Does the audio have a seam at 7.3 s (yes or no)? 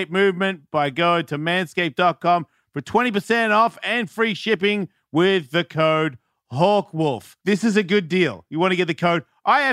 yes